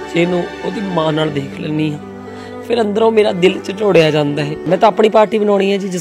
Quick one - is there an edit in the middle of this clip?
yes; 1 cut; at 4.6 s

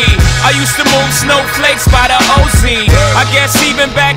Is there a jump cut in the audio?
no; 0 cuts

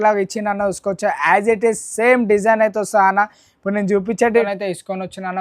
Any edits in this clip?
yes; 1 cut; at 4.5 s

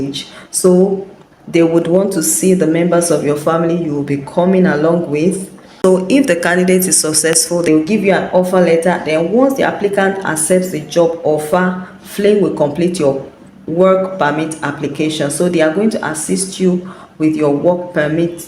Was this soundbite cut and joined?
yes; 1 cut; at 7.7 s

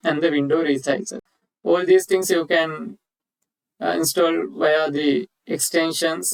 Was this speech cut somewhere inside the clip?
no; 0 cuts

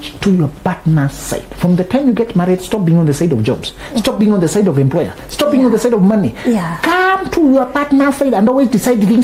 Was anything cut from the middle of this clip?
no; 0 cuts

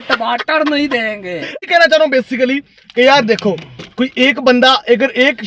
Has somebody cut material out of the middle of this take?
yes; 1 cut; at 1.5 s

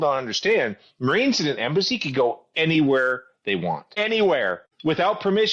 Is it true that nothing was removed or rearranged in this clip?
no; 2 cuts; at 3.9 s, 4.7 s

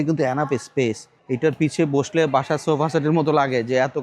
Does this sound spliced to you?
yes; 1 cut; at 1.1 s

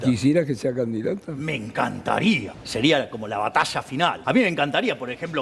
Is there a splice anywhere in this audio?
yes; 2 cuts; at 2.6 s, 4.2 s

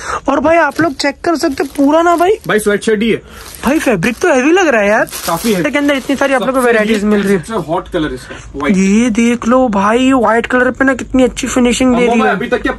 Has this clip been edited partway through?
yes; 1 cut; at 5.6 s

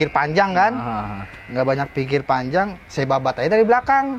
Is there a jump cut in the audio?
no; 0 cuts

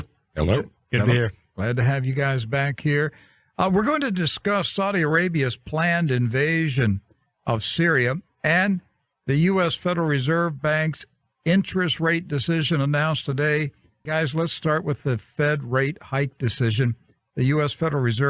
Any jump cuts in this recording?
yes; 1 cut; at 12.7 s

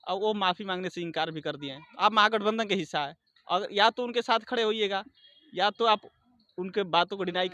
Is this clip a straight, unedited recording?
yes; 0 cuts

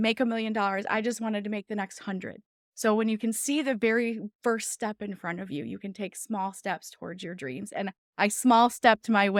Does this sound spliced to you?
no; 0 cuts

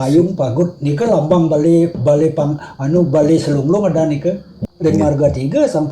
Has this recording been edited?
yes; 1 cut; at 4.5 s

